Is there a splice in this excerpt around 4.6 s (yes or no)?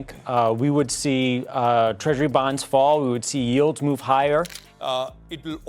yes